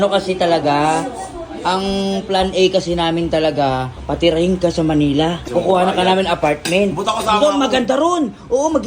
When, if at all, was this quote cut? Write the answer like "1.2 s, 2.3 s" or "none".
3.9 s, 5.4 s